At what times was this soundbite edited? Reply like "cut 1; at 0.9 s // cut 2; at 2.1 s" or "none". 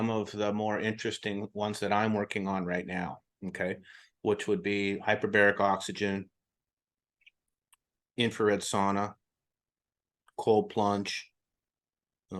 none